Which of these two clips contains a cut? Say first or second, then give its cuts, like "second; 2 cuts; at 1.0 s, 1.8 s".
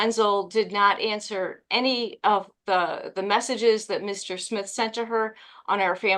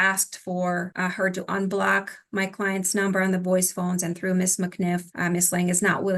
second; 2 cuts; at 0.9 s, 5.1 s